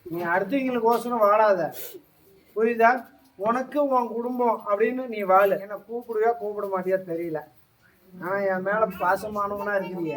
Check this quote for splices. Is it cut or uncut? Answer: cut